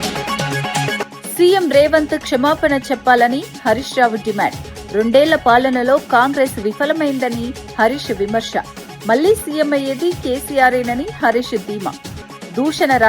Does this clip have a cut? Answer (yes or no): yes